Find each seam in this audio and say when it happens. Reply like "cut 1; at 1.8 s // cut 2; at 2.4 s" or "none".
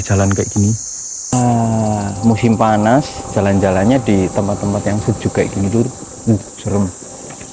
cut 1; at 1.3 s